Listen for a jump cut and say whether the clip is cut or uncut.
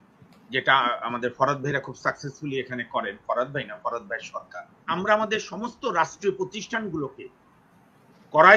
cut